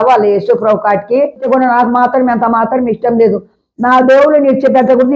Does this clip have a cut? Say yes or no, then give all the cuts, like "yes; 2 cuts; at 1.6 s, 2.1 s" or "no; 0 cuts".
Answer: yes; 1 cut; at 1.4 s